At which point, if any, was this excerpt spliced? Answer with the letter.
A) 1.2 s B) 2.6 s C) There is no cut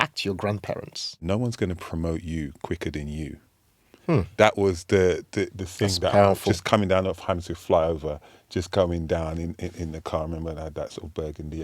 A